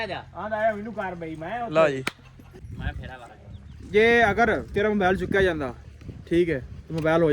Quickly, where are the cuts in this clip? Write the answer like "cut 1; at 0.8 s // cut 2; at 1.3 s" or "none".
cut 1; at 2.7 s

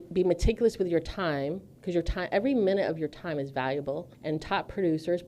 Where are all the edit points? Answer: cut 1; at 4.1 s

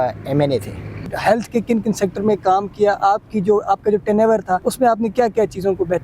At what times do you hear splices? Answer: cut 1; at 1.0 s // cut 2; at 4.7 s

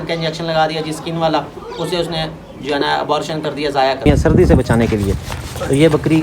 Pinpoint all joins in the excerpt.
cut 1; at 4.1 s

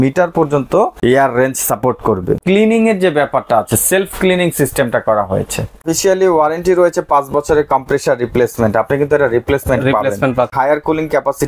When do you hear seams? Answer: cut 1; at 0.9 s // cut 2; at 2.4 s // cut 3; at 5.9 s // cut 4; at 10.5 s

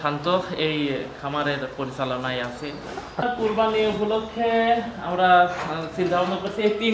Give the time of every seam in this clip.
cut 1; at 3.2 s

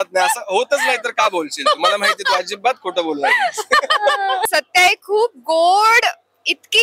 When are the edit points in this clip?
cut 1; at 4.5 s

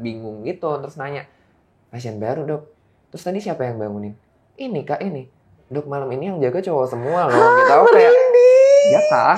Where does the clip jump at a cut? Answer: none

